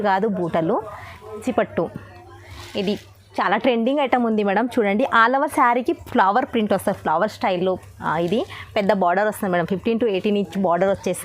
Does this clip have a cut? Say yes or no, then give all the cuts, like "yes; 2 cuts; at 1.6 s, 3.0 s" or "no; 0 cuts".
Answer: yes; 1 cut; at 1.4 s